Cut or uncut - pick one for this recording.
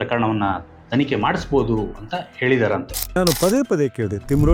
uncut